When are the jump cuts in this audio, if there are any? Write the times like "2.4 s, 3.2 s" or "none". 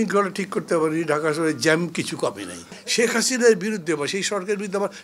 2.7 s